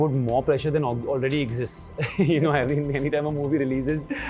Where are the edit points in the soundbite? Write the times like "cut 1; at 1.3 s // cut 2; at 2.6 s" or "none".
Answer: none